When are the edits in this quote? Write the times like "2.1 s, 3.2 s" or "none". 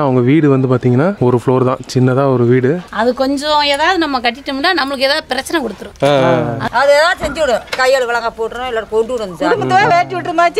1.2 s, 2.9 s, 6.6 s